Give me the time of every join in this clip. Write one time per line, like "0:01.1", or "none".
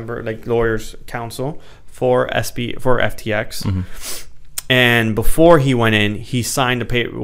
none